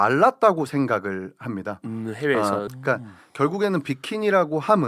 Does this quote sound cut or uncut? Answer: cut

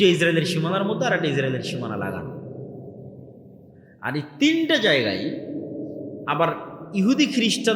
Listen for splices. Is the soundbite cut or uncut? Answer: uncut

